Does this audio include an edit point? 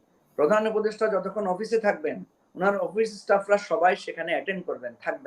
no; 0 cuts

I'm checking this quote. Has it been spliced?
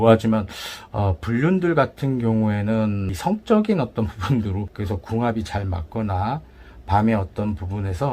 yes; 2 cuts; at 3.1 s, 4.7 s

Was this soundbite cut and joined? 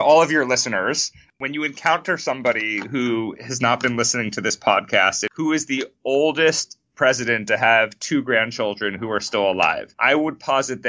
yes; 3 cuts; at 1.3 s, 5.2 s, 9.9 s

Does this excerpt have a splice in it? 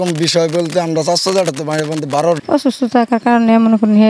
yes; 1 cut; at 2.4 s

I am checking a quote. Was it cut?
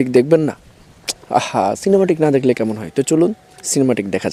no; 0 cuts

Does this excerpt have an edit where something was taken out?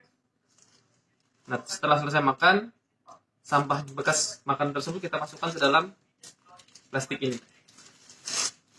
no; 0 cuts

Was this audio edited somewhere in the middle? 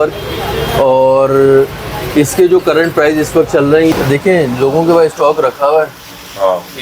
yes; 1 cut; at 3.9 s

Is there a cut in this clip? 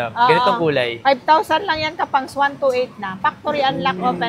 no; 0 cuts

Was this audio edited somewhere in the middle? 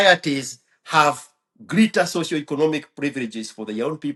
no; 0 cuts

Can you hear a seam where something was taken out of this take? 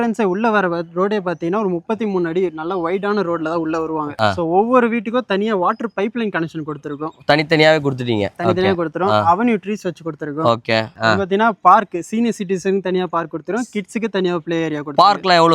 yes; 2 cuts; at 4.1 s, 10.9 s

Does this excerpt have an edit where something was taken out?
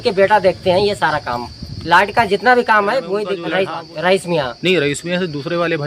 yes; 1 cut; at 3.4 s

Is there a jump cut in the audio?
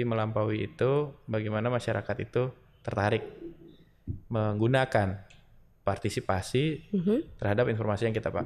no; 0 cuts

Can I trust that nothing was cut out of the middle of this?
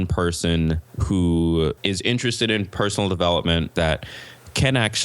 no; 3 cuts; at 0.9 s, 1.8 s, 3.7 s

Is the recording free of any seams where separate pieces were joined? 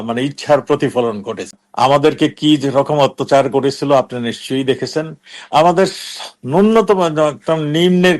no; 1 cut; at 1.6 s

